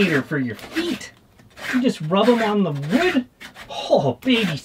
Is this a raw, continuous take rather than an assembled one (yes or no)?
yes